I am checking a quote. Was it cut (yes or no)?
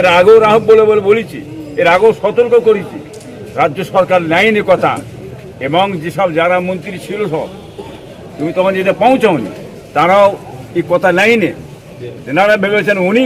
no